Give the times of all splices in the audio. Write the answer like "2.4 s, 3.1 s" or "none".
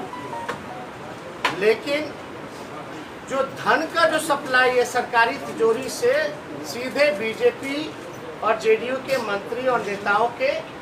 none

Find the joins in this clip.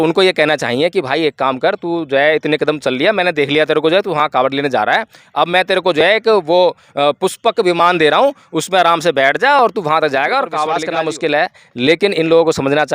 10.9 s

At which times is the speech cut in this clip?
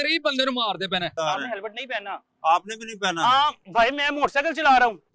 1.1 s

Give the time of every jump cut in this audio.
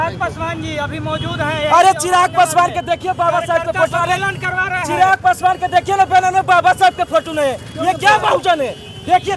none

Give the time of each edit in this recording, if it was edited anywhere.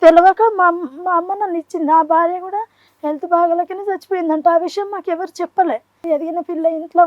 6.0 s

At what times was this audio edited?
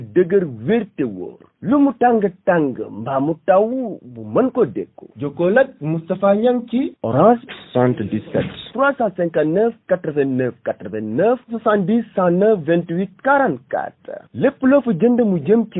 none

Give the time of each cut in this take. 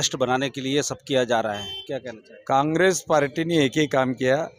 none

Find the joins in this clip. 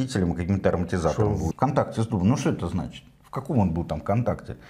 1.5 s

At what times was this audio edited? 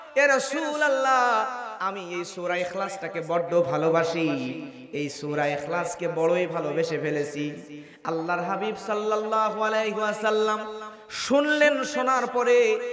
none

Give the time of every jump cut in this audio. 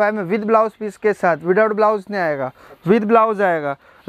none

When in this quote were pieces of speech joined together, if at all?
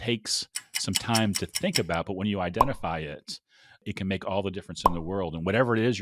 none

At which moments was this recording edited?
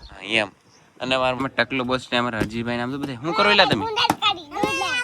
1.4 s

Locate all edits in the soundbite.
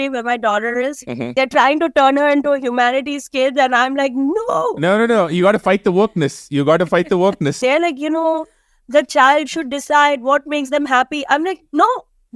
1.3 s, 7.6 s

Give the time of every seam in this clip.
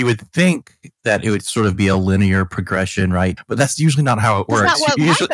3.4 s

